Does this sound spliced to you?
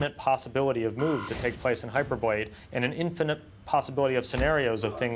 no; 0 cuts

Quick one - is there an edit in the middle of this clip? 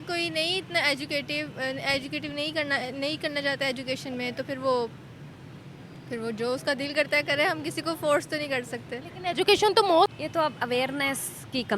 yes; 1 cut; at 10.1 s

